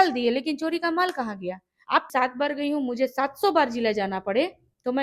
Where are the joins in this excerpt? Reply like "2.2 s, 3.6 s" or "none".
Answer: 2.1 s